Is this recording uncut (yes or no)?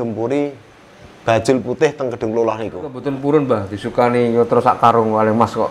no